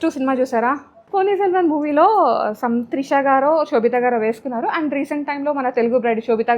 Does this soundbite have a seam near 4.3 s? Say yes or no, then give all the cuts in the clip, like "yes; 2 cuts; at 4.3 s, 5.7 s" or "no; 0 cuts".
no; 1 cut; at 1.0 s